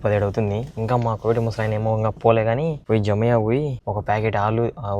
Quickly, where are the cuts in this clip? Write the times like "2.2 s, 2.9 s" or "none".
2.8 s, 3.8 s